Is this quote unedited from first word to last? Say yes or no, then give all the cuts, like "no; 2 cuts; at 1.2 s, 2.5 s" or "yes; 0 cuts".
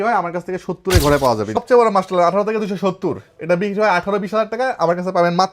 no; 1 cut; at 1.6 s